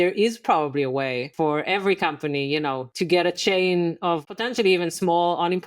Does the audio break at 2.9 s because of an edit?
yes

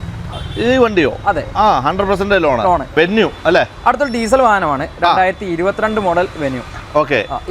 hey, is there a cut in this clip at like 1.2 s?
no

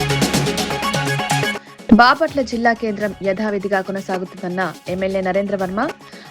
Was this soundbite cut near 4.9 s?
no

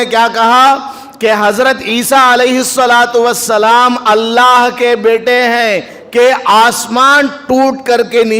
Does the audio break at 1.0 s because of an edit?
no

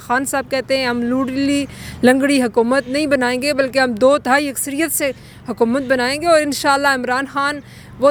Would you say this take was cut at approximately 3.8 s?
no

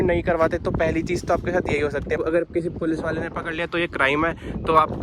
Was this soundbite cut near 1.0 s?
no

